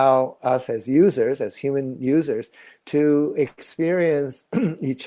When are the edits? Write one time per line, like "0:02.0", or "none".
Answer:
none